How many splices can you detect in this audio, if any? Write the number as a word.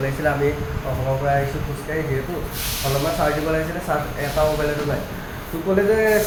zero